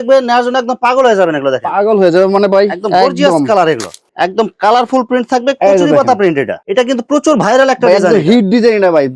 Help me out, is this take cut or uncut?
uncut